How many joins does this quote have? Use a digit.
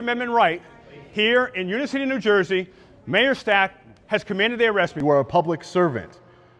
1